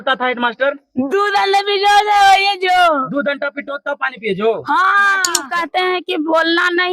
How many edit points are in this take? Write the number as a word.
one